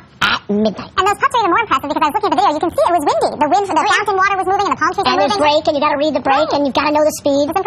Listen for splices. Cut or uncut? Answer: uncut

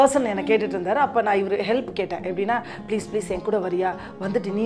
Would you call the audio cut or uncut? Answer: uncut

